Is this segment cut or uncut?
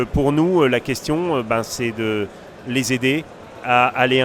uncut